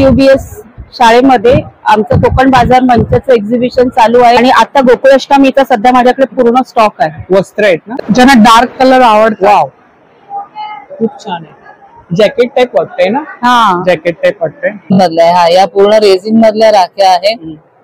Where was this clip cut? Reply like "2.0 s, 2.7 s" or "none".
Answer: 4.4 s, 7.9 s, 15.0 s